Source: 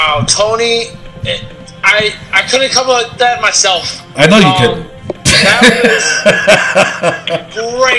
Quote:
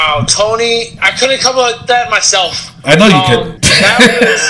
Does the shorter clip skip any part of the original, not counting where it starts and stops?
yes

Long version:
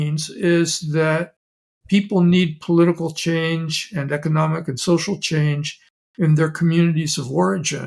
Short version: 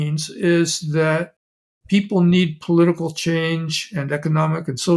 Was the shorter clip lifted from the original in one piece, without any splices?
yes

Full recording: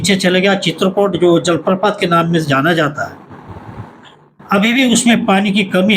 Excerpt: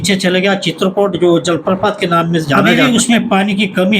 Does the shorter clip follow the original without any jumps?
no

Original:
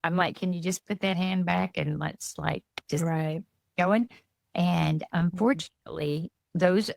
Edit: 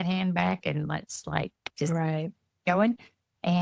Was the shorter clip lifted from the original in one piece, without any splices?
yes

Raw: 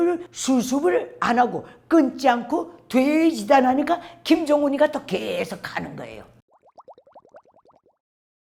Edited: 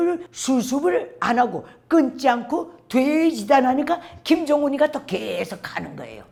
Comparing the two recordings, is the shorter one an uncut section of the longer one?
yes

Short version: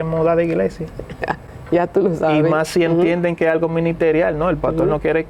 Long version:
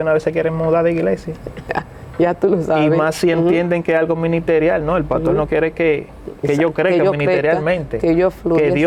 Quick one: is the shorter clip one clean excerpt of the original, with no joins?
yes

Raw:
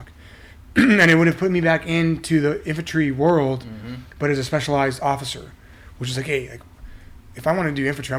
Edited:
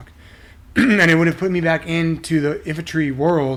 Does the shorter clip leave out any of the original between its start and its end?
no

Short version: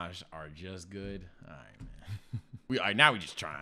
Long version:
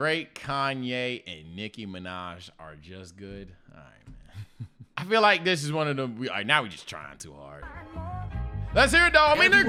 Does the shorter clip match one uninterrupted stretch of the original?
no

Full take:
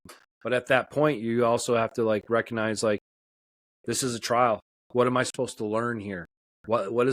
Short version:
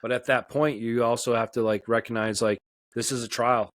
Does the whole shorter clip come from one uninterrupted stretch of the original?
no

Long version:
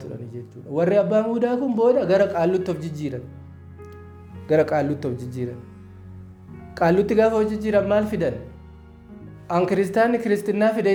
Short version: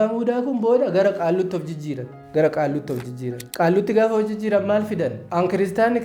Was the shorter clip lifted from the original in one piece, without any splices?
no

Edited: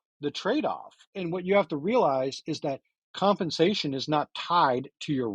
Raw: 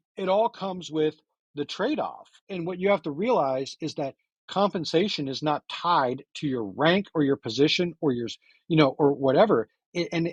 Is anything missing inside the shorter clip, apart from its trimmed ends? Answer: no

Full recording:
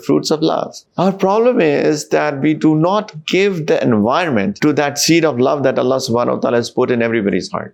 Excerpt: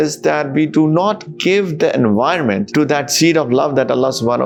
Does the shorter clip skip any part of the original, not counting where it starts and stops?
no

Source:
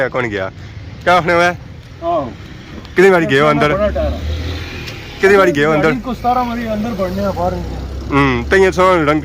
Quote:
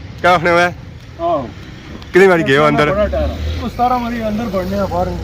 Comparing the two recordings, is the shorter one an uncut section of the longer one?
no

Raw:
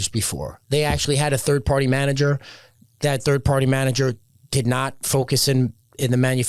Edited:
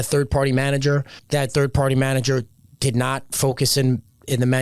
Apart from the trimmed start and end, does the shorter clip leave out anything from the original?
yes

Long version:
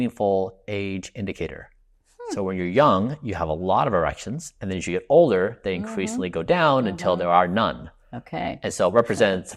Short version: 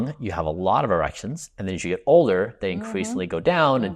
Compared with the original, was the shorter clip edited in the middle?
no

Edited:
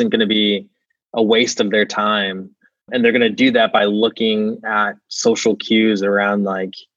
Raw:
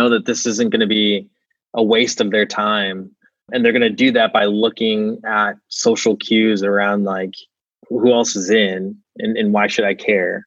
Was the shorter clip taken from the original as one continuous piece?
yes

